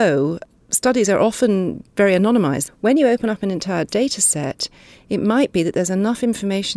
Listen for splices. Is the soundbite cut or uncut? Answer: cut